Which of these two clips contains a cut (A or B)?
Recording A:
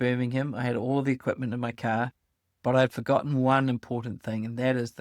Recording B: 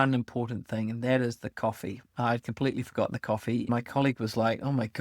B